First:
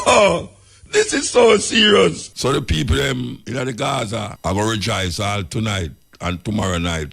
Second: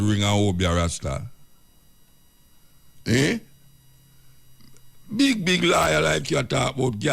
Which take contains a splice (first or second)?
first